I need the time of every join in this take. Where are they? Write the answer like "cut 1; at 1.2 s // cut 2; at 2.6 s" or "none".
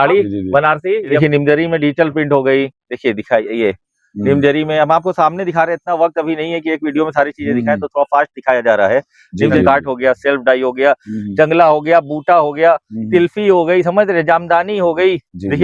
cut 1; at 1.1 s // cut 2; at 9.6 s